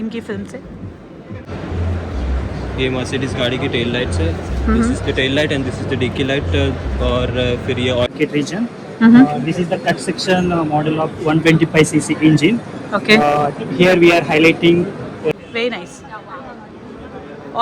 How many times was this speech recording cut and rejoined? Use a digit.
3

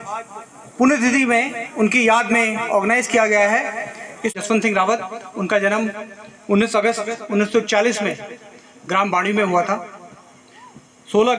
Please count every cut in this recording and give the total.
1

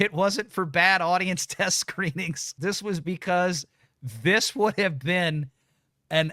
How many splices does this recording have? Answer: 1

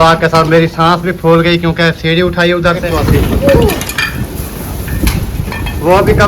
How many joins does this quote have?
1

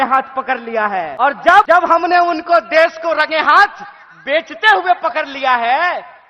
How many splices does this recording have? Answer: 2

